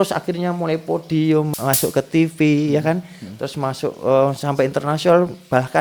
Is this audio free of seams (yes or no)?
no